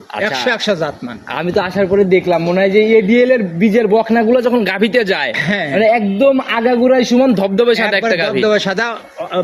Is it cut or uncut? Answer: uncut